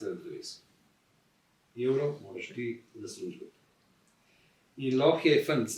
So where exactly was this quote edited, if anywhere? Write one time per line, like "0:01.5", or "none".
none